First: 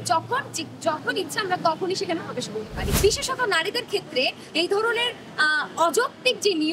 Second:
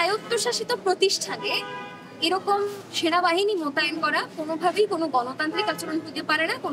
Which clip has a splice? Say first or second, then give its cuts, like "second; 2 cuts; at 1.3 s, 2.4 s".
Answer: first; 1 cut; at 2.8 s